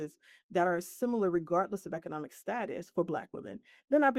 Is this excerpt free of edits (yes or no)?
yes